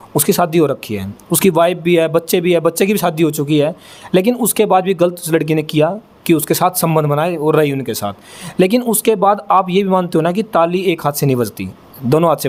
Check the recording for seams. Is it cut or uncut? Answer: uncut